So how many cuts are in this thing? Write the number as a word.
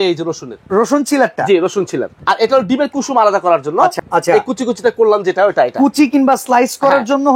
two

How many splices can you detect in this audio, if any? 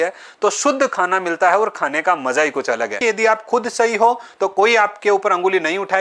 one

